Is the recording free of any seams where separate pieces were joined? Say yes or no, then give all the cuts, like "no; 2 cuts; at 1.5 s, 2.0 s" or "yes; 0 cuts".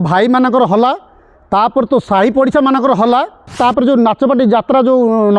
no; 1 cut; at 3.5 s